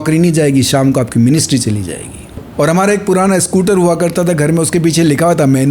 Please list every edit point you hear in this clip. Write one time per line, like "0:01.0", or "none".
0:02.5